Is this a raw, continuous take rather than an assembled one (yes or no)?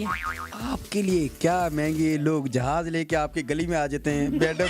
yes